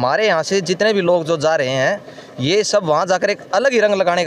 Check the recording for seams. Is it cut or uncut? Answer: uncut